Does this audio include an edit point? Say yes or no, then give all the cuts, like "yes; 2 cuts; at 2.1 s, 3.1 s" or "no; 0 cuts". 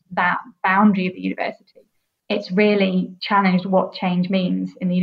yes; 2 cuts; at 2.2 s, 3.2 s